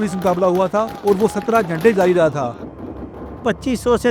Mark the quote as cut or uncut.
cut